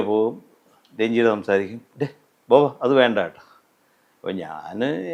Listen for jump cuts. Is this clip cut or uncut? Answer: uncut